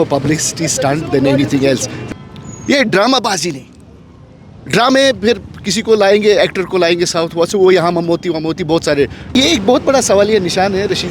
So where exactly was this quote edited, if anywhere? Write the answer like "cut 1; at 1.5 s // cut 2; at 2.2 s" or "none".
cut 1; at 1.9 s // cut 2; at 9.3 s